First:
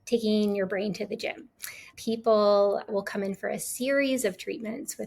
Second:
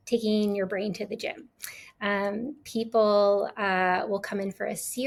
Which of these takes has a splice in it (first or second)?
first